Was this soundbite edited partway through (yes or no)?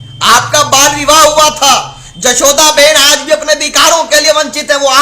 no